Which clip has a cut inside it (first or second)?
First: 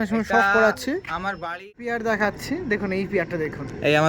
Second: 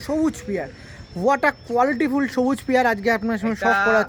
first